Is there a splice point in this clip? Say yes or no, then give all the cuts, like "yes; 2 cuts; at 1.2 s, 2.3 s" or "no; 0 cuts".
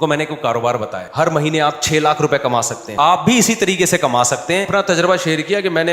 yes; 3 cuts; at 1.0 s, 2.8 s, 4.7 s